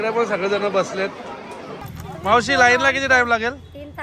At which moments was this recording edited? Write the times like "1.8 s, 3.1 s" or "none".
1.8 s